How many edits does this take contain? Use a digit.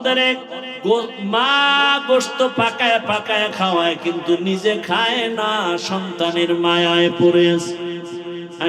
0